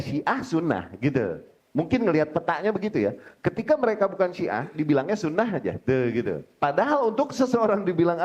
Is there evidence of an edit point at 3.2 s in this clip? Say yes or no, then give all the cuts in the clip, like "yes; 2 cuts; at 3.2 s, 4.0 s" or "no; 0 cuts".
no; 2 cuts; at 1.5 s, 6.5 s